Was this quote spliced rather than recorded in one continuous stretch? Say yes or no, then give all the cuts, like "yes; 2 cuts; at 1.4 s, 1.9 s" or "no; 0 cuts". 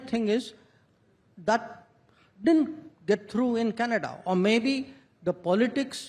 no; 0 cuts